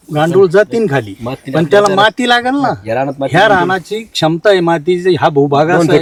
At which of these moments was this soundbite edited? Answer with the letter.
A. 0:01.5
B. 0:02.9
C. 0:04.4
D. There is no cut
D